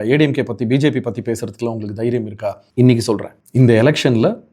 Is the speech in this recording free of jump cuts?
no; 2 cuts; at 2.6 s, 3.4 s

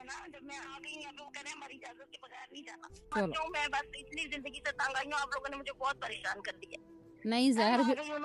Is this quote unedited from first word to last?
no; 1 cut; at 3.0 s

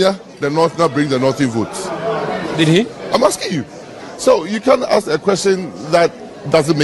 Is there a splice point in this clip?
no; 0 cuts

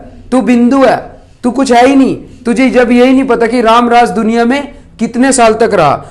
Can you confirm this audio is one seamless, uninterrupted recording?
yes; 0 cuts

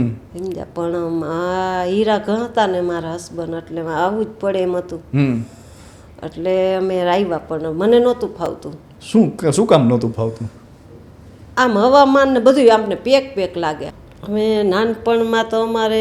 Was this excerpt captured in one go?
no; 1 cut; at 13.8 s

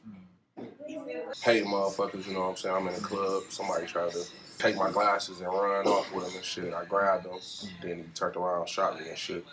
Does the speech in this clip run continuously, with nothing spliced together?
no; 2 cuts; at 1.3 s, 4.6 s

